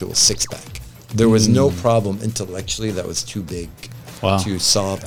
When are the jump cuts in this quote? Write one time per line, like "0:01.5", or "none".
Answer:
none